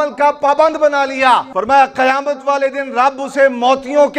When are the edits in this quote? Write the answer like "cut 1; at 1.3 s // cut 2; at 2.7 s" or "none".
cut 1; at 1.5 s